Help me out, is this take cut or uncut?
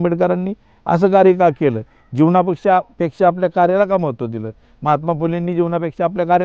uncut